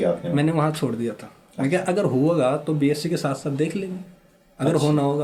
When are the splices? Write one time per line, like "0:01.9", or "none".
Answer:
none